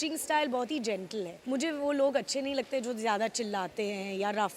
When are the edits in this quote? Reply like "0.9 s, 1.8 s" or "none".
1.3 s

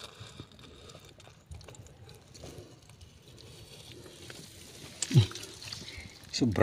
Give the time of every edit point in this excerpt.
none

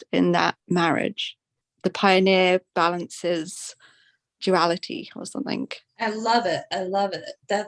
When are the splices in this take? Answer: 1.6 s

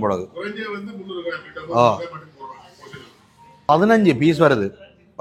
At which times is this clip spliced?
3.7 s

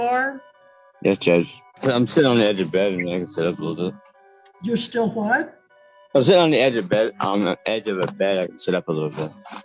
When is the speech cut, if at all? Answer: 1.6 s

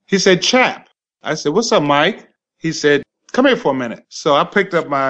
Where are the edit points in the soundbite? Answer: 3.0 s

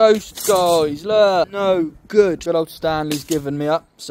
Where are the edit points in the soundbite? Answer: 1.5 s, 2.4 s

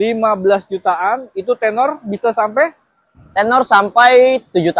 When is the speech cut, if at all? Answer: none

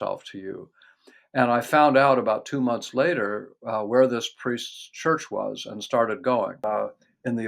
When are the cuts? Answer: 6.6 s

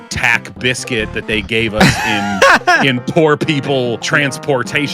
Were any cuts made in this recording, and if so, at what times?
4.0 s

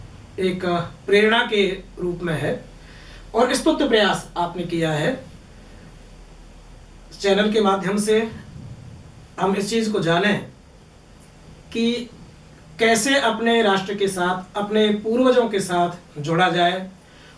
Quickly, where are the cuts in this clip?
none

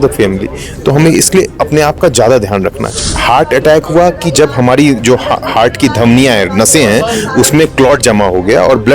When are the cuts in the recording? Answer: 3.0 s

